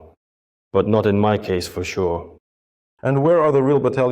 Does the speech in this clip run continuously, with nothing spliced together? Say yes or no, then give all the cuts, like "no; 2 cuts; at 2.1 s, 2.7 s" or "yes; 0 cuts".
no; 1 cut; at 2.9 s